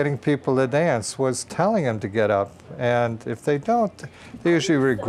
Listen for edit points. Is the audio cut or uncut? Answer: uncut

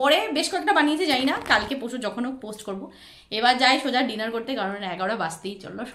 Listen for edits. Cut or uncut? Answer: uncut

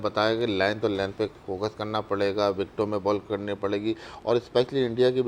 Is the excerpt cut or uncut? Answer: uncut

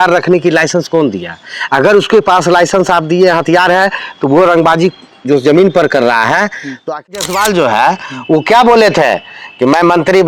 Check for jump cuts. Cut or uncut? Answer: cut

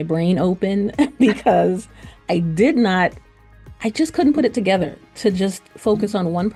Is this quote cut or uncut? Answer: uncut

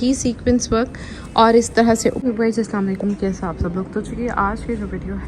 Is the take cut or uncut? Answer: cut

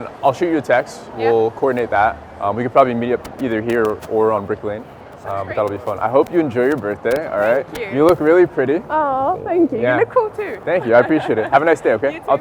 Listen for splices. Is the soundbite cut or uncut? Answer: uncut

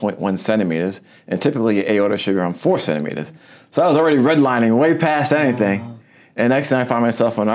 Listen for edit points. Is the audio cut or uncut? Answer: uncut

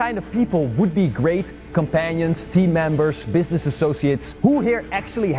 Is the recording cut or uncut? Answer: cut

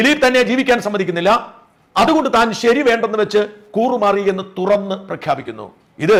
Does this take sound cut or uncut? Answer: uncut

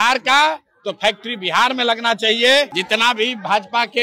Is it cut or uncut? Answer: cut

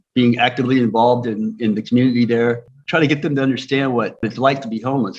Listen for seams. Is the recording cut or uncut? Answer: cut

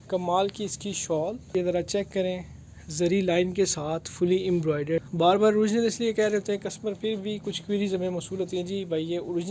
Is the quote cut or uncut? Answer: cut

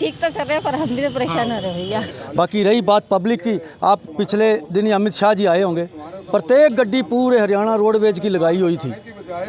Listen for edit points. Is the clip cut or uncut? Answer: cut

